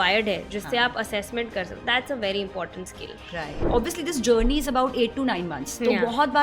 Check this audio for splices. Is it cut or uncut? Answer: cut